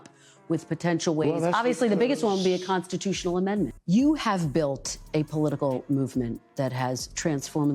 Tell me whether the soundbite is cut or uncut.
cut